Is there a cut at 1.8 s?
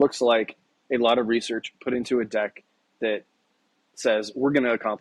no; 0 cuts

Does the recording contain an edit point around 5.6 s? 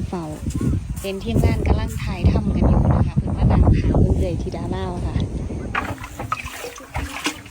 yes; 1 cut; at 5.6 s

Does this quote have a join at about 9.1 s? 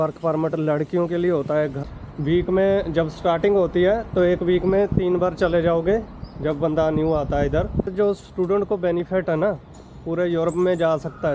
no; 2 cuts; at 1.8 s, 7.9 s

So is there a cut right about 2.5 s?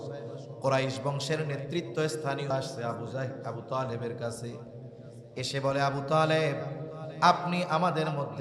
yes; 1 cut; at 2.5 s

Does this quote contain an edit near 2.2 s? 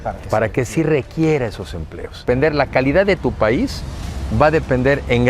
yes; 1 cut; at 2.2 s

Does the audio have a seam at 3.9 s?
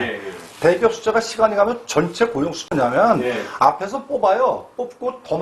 no; 1 cut; at 2.7 s

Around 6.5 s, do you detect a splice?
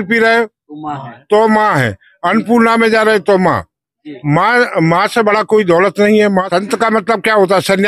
yes; 1 cut; at 6.5 s

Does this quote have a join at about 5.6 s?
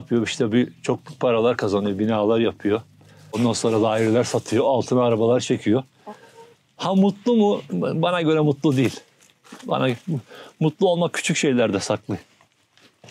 no; 1 cut; at 3.4 s

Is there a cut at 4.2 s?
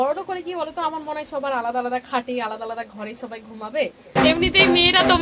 yes; 1 cut; at 4.2 s

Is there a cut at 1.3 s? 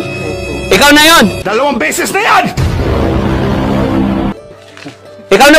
no; 0 cuts

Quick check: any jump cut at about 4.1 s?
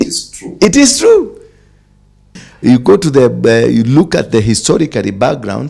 no; 1 cut; at 2.1 s

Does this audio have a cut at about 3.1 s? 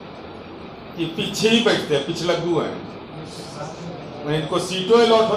no; 0 cuts

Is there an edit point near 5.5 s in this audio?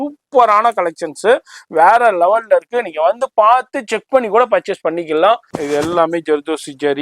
yes; 1 cut; at 5.5 s

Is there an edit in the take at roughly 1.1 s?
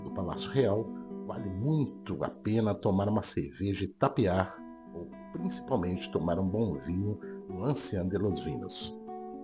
no; 0 cuts

